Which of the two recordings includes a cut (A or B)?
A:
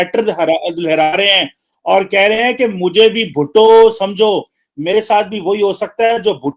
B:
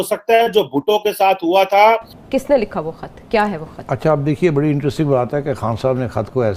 B